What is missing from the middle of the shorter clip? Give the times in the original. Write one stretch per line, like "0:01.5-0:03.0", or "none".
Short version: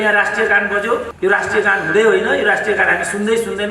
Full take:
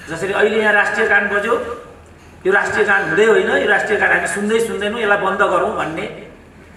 0:01.7-0:02.3